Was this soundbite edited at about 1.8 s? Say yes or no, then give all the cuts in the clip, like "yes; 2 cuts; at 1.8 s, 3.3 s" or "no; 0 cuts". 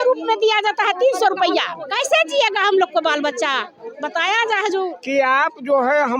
yes; 2 cuts; at 1.8 s, 5.0 s